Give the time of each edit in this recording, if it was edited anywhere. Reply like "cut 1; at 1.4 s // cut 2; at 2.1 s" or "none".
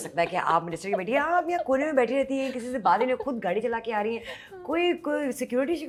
none

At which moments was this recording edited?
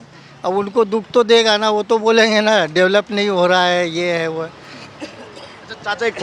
none

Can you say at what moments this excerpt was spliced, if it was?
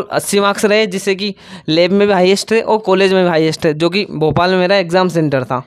none

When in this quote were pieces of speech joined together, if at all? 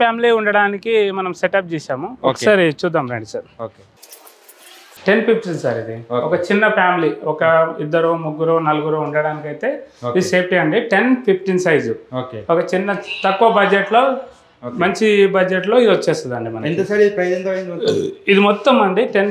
none

